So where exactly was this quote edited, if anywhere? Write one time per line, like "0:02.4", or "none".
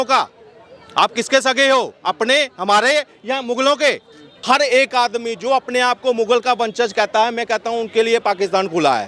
0:04.3